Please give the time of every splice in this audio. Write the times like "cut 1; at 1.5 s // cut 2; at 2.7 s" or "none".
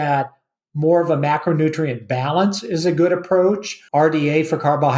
cut 1; at 3.7 s